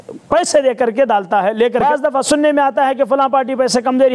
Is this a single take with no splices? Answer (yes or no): no